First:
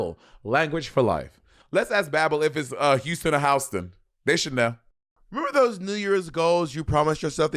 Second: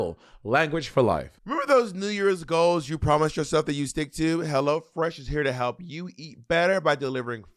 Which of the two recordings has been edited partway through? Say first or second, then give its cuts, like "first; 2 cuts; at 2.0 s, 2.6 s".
second; 1 cut; at 1.4 s